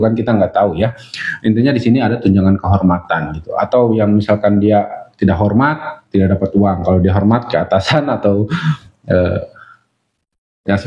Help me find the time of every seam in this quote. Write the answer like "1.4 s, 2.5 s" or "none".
none

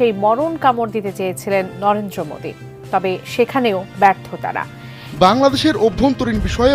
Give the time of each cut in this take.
5.0 s

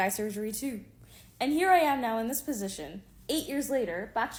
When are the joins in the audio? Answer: none

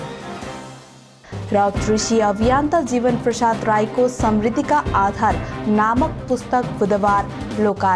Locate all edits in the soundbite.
1.0 s

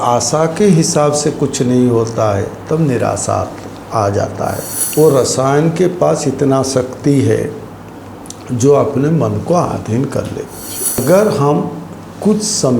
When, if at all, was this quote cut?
4.7 s, 11.0 s

